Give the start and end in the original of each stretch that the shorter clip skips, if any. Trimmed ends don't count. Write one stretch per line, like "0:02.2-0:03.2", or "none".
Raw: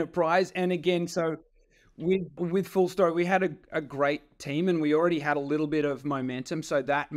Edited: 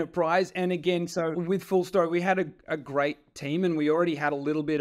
0:01.3-0:02.4